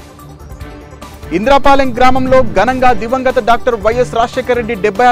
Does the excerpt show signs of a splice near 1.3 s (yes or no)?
yes